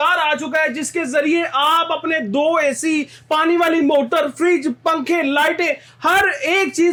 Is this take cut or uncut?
uncut